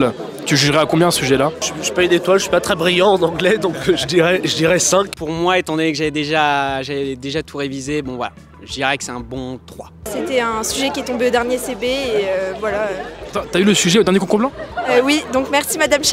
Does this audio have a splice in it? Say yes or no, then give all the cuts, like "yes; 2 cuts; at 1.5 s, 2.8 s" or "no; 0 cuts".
yes; 3 cuts; at 1.6 s, 5.1 s, 10.1 s